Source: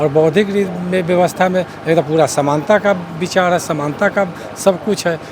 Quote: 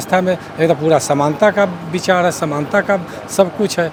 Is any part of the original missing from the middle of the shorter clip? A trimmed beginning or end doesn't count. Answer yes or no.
no